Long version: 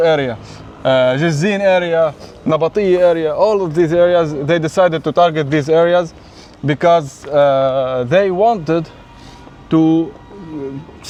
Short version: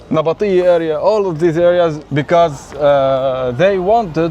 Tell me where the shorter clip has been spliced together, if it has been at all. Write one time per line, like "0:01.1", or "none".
0:02.0